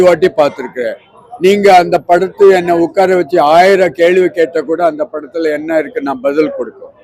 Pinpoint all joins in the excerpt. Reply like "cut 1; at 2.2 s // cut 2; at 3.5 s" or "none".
none